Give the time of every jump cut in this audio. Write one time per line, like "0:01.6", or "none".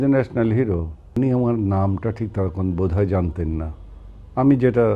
0:01.0